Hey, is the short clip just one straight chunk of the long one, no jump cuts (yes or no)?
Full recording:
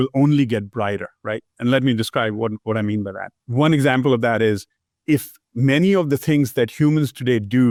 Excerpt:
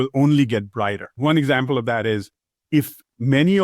no